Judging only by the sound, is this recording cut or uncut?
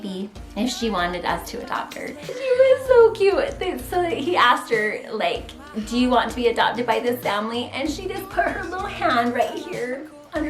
cut